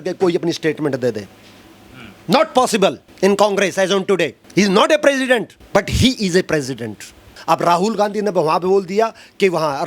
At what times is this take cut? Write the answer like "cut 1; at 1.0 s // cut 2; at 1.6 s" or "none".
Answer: cut 1; at 3.1 s // cut 2; at 4.4 s // cut 3; at 5.6 s // cut 4; at 7.3 s